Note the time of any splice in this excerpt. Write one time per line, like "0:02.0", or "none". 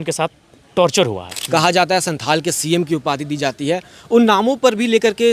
0:01.3